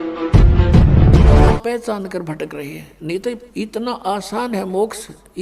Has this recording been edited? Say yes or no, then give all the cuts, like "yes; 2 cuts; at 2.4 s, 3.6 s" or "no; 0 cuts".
yes; 1 cut; at 1.6 s